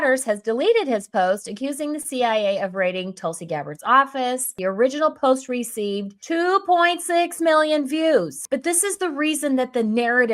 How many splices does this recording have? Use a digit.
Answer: 2